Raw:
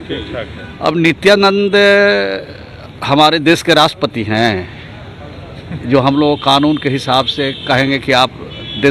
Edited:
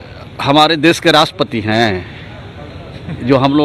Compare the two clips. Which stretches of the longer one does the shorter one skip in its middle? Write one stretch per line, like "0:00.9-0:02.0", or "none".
none